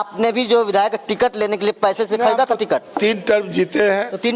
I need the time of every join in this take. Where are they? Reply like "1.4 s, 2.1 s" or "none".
none